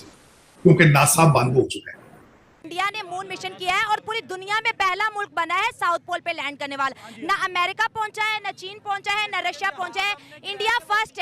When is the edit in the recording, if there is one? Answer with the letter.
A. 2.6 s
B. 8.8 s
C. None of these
A